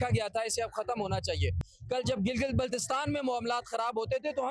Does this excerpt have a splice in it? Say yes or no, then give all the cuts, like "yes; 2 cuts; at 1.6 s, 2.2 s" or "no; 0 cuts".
yes; 1 cut; at 1.6 s